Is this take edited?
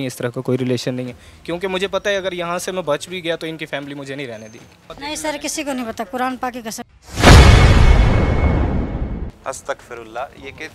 yes; 1 cut; at 4.8 s

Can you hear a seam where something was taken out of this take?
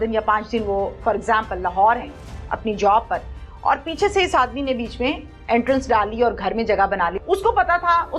yes; 1 cut; at 7.2 s

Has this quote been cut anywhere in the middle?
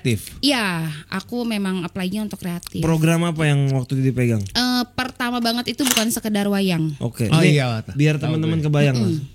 no; 0 cuts

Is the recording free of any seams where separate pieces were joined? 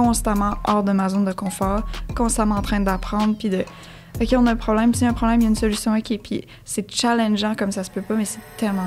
yes; 0 cuts

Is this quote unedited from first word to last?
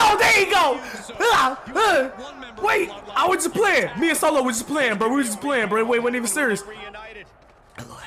yes; 0 cuts

